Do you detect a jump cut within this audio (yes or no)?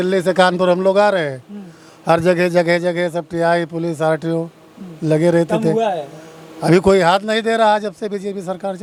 no